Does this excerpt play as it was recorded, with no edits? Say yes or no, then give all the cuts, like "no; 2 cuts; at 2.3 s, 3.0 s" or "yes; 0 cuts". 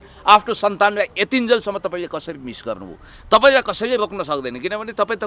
yes; 0 cuts